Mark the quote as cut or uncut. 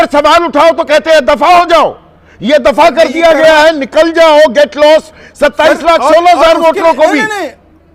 uncut